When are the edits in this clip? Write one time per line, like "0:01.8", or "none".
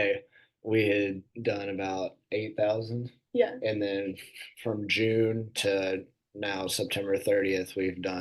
none